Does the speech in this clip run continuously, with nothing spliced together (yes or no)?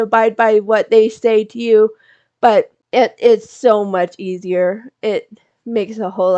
no